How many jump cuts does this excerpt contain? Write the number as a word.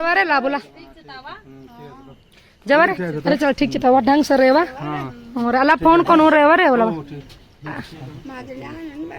zero